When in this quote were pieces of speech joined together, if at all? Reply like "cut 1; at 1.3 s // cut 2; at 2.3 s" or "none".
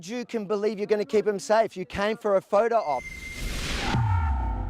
cut 1; at 3.2 s